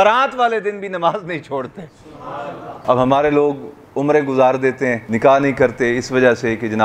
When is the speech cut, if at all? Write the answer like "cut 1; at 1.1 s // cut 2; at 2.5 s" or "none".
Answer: cut 1; at 2.8 s // cut 2; at 5.1 s